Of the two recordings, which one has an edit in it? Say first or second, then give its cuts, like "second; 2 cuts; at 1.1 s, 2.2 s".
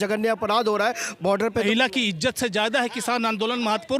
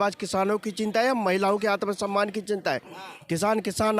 first; 1 cut; at 1.6 s